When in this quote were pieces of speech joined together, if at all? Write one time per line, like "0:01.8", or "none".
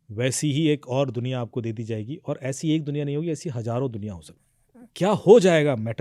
0:04.2